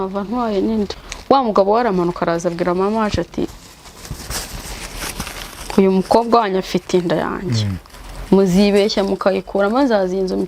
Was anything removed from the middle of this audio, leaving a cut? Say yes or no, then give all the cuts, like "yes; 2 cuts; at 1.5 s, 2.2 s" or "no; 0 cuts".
yes; 1 cut; at 1.1 s